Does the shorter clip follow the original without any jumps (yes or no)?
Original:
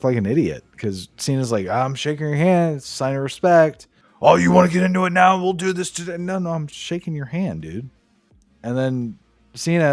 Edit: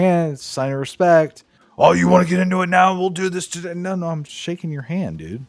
yes